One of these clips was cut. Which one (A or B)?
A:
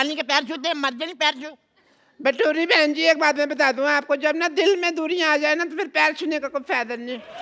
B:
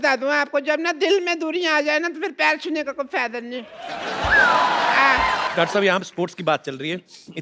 B